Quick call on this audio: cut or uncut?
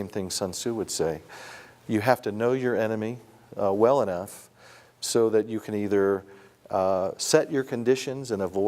uncut